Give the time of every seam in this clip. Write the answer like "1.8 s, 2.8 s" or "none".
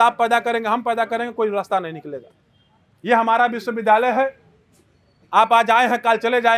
none

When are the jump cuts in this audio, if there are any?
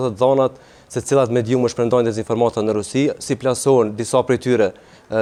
none

